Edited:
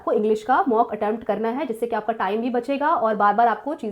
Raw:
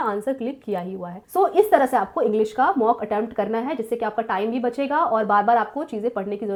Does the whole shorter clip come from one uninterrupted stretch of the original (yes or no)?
yes